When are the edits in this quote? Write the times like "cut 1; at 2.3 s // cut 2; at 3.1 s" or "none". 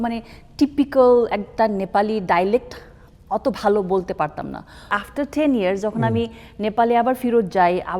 cut 1; at 4.9 s